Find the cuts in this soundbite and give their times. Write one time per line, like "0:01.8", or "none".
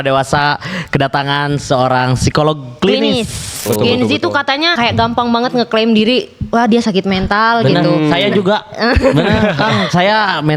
0:03.6
0:04.7